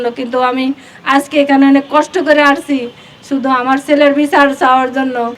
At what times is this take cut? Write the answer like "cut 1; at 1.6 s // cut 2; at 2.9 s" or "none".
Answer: none